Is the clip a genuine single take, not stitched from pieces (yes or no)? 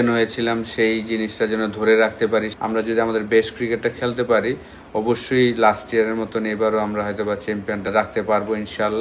no